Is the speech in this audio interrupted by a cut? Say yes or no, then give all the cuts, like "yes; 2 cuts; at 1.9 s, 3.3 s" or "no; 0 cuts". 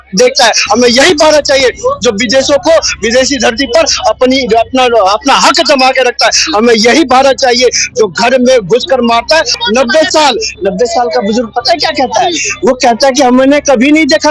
yes; 1 cut; at 9.5 s